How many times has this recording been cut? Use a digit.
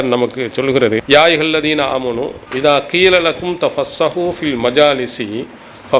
2